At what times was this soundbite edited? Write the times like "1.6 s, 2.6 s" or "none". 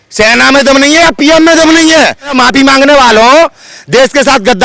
2.3 s